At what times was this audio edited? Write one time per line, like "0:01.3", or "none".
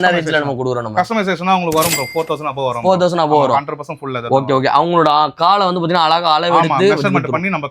none